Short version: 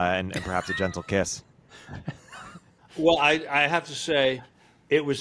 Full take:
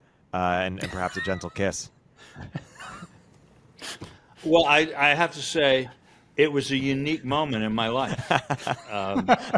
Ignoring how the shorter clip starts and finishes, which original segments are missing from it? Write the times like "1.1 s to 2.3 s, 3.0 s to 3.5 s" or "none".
3.2 s to 4.2 s